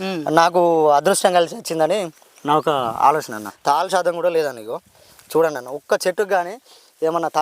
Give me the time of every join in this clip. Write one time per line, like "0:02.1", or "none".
0:03.5